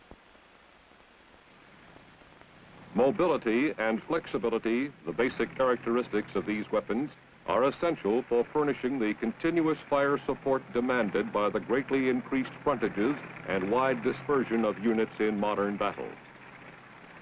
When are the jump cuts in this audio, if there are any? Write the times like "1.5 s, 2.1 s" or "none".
5.0 s